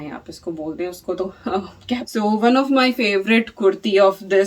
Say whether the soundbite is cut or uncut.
cut